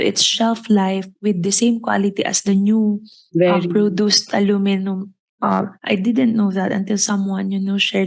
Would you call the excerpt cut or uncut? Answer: uncut